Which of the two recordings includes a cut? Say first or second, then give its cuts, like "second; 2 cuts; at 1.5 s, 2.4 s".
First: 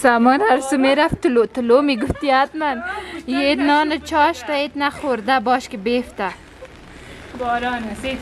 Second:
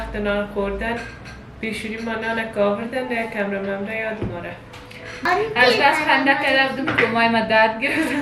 second; 1 cut; at 5.3 s